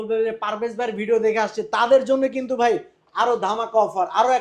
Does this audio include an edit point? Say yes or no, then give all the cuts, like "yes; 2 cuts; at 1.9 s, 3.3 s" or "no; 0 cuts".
no; 0 cuts